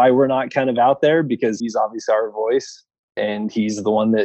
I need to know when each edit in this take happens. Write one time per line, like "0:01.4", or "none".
0:01.6
0:03.2